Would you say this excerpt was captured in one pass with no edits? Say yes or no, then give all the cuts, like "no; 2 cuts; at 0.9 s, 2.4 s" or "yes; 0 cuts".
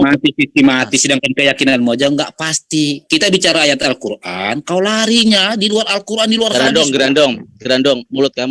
yes; 0 cuts